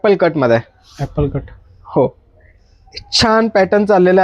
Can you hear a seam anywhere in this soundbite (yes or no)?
no